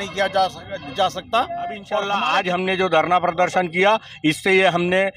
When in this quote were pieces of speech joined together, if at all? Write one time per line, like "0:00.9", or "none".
0:02.0